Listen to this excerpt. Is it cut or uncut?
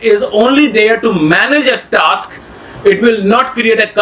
uncut